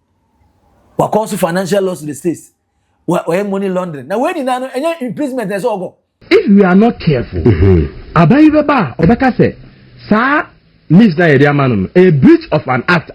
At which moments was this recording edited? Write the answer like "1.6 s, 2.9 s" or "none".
6.1 s